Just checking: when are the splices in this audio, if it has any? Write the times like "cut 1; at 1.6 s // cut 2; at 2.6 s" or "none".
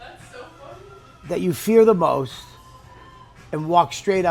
none